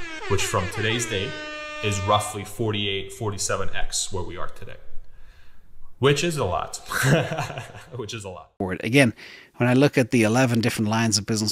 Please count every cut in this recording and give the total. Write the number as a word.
one